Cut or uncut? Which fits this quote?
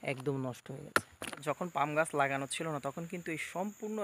cut